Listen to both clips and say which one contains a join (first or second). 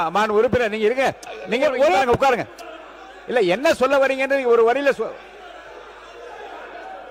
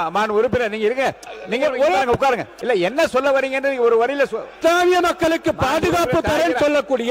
second